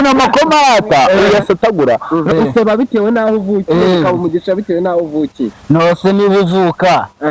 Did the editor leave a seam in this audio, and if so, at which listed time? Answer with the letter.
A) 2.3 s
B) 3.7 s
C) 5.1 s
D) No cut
A